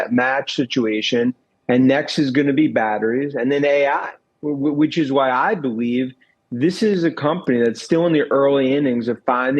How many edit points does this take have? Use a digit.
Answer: 0